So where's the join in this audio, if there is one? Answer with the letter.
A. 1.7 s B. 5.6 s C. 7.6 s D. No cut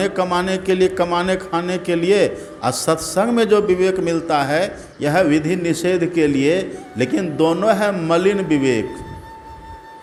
D